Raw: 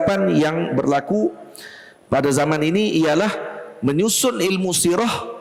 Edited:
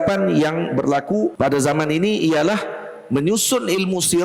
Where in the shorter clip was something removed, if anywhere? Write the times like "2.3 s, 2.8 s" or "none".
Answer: 1.3 s